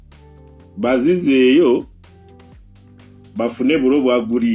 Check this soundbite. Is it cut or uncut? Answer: cut